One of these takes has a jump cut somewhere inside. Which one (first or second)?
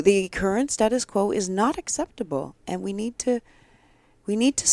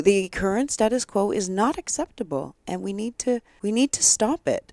second